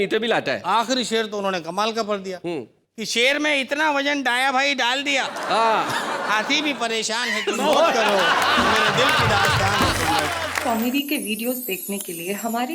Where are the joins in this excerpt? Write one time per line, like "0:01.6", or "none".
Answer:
0:10.5